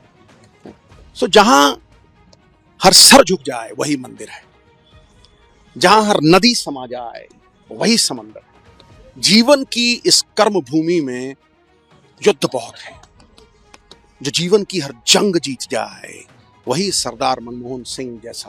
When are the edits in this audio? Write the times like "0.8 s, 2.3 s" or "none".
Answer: none